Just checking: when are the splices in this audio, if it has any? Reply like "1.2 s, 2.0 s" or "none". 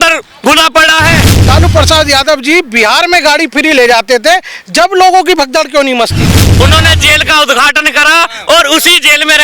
1.3 s, 6.6 s